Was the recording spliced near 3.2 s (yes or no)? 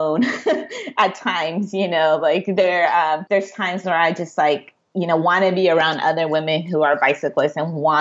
yes